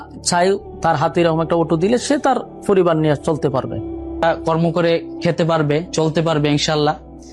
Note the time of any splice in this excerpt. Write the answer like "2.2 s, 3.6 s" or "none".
4.2 s